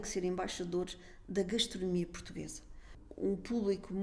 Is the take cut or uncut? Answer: cut